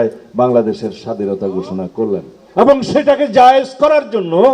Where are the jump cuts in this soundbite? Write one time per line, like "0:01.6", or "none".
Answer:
0:02.4